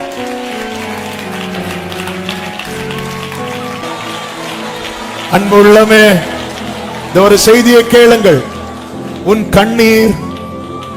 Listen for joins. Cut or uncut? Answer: cut